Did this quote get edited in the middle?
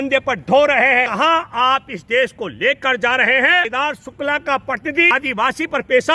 yes; 3 cuts; at 1.1 s, 3.7 s, 5.1 s

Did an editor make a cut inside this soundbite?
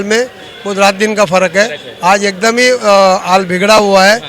no; 0 cuts

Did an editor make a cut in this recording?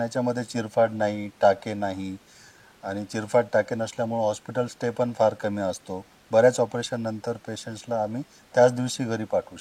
no; 0 cuts

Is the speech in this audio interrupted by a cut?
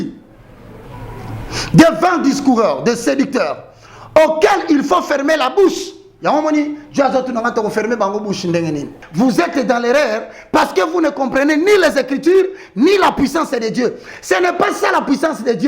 yes; 1 cut; at 9.0 s

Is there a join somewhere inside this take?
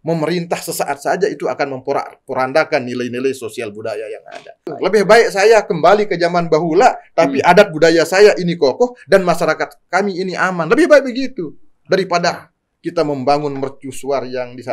yes; 1 cut; at 4.7 s

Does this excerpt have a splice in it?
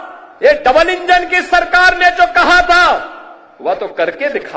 no; 0 cuts

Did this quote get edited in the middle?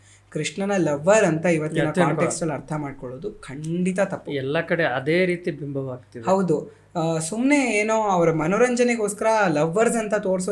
no; 0 cuts

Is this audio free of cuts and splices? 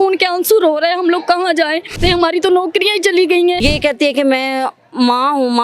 no; 2 cuts; at 2.0 s, 3.6 s

